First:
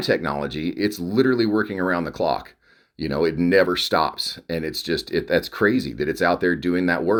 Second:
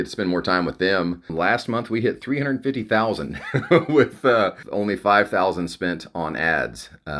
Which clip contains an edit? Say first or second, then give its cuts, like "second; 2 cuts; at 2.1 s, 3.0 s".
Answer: second; 2 cuts; at 1.3 s, 4.6 s